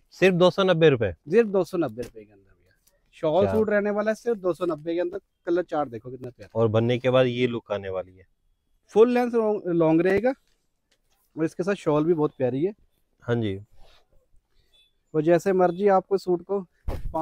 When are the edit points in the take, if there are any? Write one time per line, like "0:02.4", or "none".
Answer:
none